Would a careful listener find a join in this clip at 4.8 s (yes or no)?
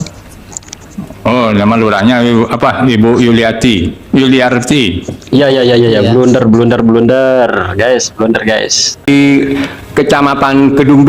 no